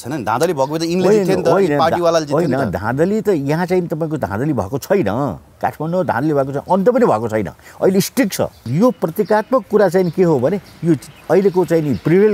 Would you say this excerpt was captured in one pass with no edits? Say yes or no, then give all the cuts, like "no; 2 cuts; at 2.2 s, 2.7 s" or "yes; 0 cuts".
no; 3 cuts; at 5.4 s, 8.7 s, 11.1 s